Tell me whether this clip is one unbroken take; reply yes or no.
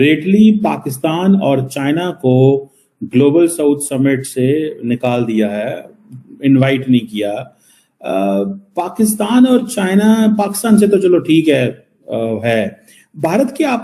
yes